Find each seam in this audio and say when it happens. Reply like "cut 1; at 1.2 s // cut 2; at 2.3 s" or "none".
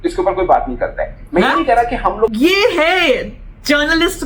cut 1; at 2.3 s